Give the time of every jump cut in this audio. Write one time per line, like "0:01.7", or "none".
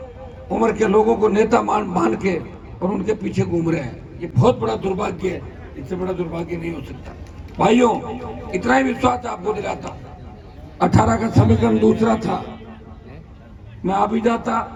none

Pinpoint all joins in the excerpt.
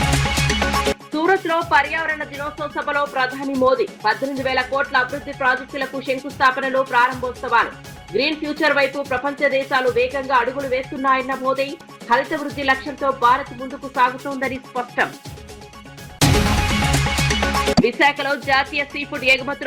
0:00.9

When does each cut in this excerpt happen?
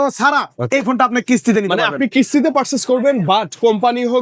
none

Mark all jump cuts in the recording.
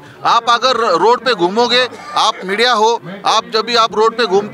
none

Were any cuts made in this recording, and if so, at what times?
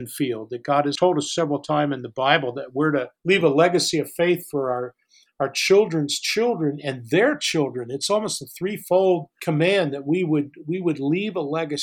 0:00.9
0:03.1
0:09.3

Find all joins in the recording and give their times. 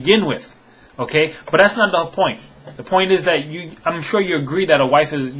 none

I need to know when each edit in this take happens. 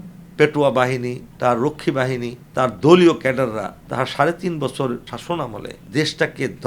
0:01.2
0:02.4
0:03.8
0:05.4

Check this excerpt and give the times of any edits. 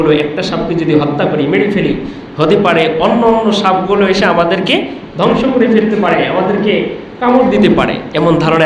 none

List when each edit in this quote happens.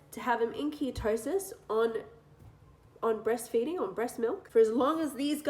0:04.4

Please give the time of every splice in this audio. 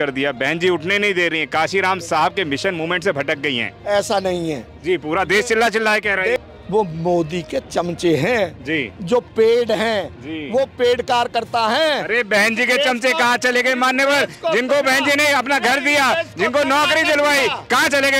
0:06.4

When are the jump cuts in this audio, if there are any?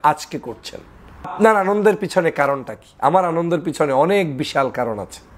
0:01.3

